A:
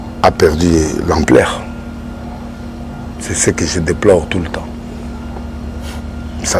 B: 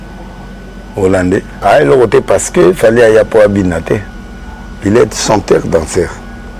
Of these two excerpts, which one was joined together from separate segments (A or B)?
B